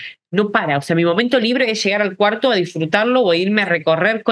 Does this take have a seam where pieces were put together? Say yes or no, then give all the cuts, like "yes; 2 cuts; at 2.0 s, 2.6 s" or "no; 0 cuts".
no; 0 cuts